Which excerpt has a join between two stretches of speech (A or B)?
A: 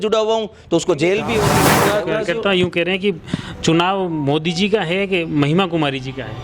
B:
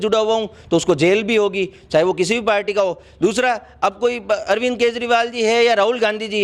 A